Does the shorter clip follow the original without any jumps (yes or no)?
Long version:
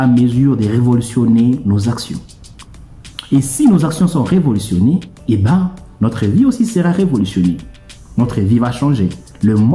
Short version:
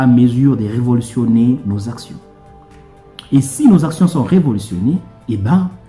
yes